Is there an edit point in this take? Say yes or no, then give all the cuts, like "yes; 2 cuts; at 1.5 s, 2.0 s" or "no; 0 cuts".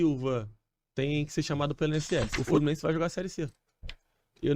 yes; 1 cut; at 2.4 s